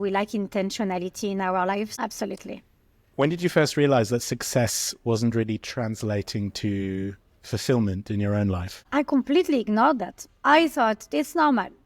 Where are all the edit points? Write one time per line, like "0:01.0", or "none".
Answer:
0:01.9
0:08.8